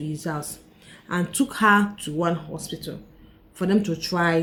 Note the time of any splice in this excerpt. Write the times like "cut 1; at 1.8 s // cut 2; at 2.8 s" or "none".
none